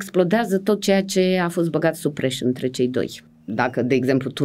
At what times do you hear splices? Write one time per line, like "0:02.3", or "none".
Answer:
0:03.2